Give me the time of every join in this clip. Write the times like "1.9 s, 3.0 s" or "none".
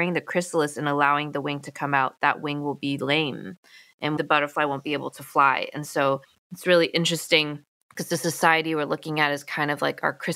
none